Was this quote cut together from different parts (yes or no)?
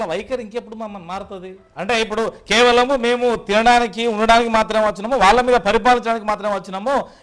no